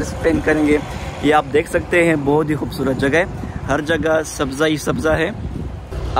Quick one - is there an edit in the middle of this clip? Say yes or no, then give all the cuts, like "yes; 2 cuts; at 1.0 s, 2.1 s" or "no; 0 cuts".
no; 0 cuts